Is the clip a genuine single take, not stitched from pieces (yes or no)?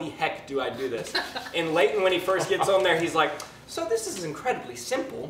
yes